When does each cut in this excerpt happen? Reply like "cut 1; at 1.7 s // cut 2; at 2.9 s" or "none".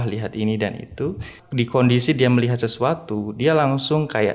cut 1; at 1.4 s